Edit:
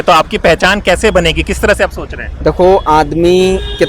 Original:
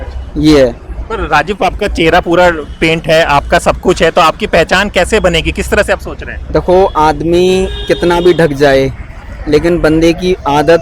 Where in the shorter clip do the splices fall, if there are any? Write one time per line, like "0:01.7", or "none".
none